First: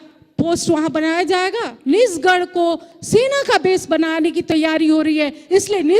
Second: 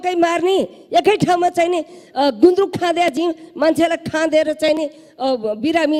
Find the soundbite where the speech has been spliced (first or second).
first